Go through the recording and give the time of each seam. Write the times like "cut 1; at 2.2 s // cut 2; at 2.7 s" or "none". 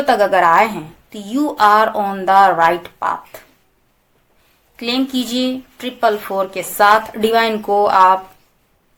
none